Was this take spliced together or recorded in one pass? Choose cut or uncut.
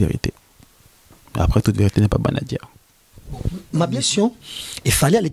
cut